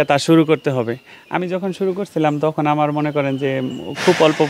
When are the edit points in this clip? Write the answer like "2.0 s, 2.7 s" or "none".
none